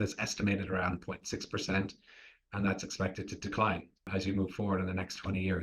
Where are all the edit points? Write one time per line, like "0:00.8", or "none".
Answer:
0:04.1